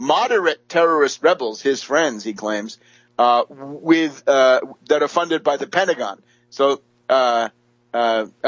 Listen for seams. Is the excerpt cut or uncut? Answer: cut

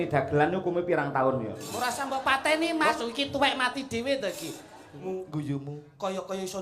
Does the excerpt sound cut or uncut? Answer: cut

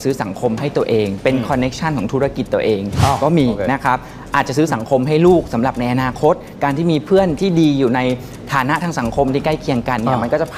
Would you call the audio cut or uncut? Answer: uncut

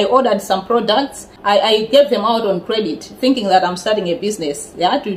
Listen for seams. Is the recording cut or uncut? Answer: cut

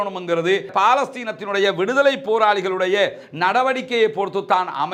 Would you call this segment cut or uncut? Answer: uncut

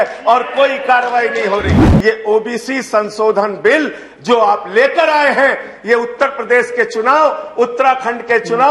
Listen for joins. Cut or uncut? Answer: cut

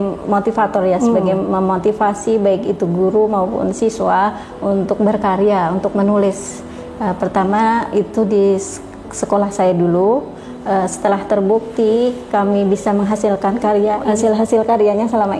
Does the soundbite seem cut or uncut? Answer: cut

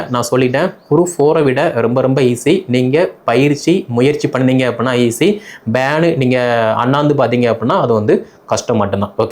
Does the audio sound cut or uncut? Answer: uncut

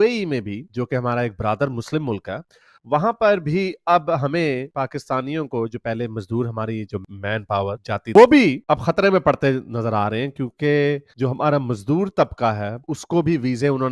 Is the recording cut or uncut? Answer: cut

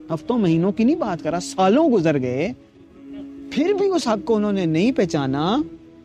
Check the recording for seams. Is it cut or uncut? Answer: uncut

